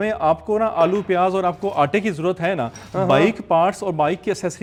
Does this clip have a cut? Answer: no; 0 cuts

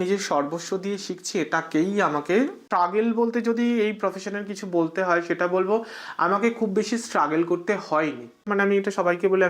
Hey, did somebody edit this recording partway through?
yes; 2 cuts; at 2.6 s, 8.5 s

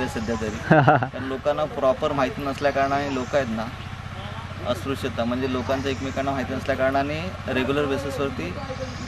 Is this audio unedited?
yes; 0 cuts

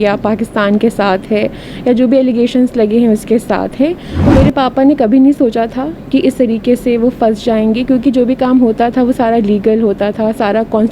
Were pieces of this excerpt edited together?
yes; 1 cut; at 4.1 s

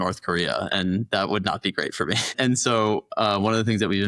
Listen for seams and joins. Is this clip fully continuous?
yes; 0 cuts

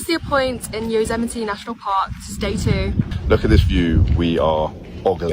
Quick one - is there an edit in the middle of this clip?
yes; 1 cut; at 3.1 s

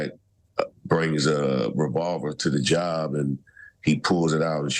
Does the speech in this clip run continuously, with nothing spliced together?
yes; 0 cuts

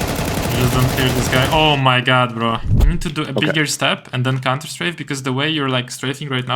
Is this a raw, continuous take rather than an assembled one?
no; 1 cut; at 2.7 s

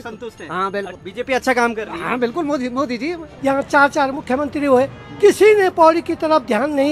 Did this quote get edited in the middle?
yes; 2 cuts; at 0.9 s, 3.3 s

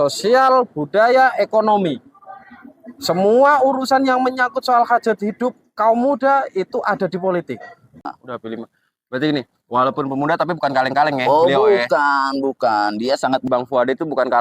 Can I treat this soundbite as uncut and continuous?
no; 2 cuts; at 8.1 s, 13.5 s

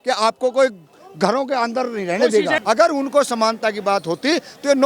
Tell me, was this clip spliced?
yes; 1 cut; at 2.6 s

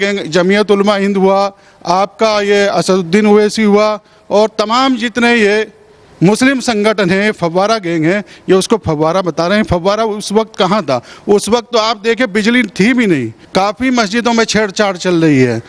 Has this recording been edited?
yes; 1 cut; at 13.4 s

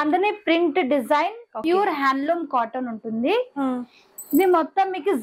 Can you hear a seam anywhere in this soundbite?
yes; 1 cut; at 1.5 s

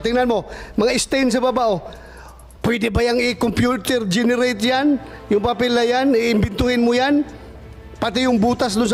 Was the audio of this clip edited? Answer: no; 0 cuts

